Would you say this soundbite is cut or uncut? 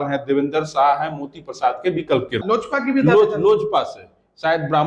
cut